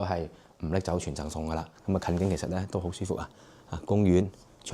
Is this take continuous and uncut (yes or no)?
no